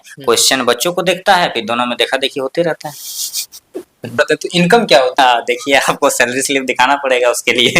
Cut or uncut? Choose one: cut